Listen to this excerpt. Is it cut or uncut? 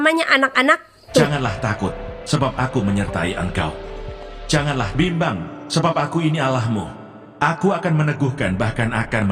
cut